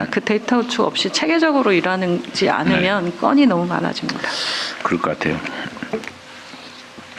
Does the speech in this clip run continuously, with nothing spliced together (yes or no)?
yes